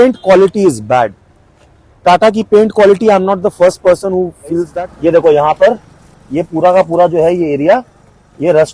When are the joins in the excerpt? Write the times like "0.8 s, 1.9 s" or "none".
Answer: 4.7 s